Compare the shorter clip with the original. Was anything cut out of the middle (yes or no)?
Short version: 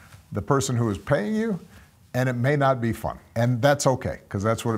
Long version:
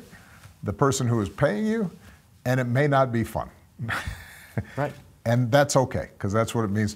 yes